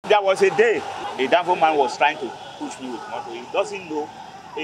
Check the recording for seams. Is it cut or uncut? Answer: cut